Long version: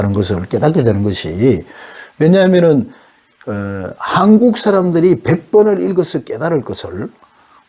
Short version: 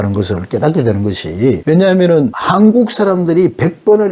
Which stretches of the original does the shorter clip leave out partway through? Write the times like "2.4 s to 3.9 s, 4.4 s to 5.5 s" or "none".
1.6 s to 2.1 s, 2.9 s to 4.0 s